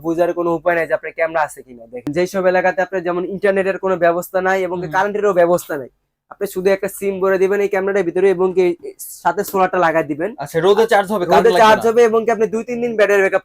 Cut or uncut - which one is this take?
cut